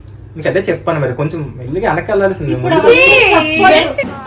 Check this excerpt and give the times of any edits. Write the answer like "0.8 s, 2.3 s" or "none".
none